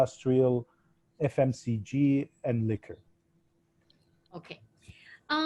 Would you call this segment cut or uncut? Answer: uncut